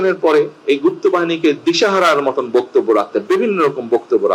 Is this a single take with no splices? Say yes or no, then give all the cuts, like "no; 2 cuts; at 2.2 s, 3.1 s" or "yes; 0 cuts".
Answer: yes; 0 cuts